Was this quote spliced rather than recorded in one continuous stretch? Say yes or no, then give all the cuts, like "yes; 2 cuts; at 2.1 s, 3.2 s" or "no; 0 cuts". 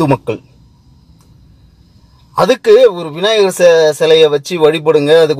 no; 0 cuts